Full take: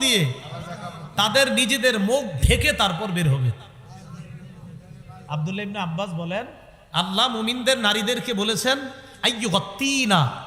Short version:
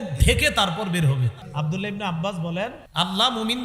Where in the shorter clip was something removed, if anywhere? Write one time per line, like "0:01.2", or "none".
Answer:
0:01.4
0:02.8